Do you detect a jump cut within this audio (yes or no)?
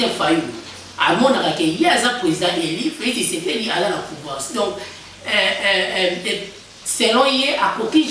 no